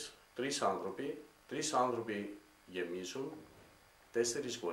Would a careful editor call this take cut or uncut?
uncut